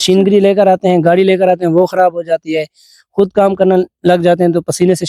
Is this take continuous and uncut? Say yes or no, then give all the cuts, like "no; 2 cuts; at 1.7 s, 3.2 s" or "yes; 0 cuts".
yes; 0 cuts